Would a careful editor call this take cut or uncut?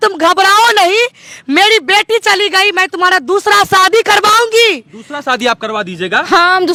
uncut